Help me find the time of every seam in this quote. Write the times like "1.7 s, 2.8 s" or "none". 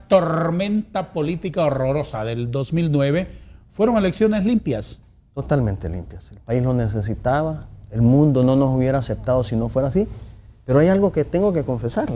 none